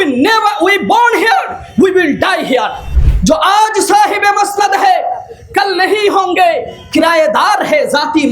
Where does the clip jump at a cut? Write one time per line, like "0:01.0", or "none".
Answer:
0:02.8